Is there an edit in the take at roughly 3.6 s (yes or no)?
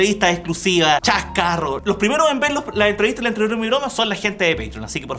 no